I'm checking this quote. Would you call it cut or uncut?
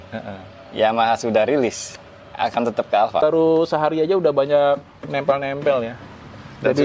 cut